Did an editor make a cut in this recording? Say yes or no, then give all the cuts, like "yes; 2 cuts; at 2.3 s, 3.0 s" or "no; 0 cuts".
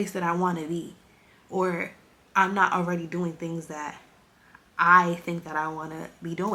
no; 0 cuts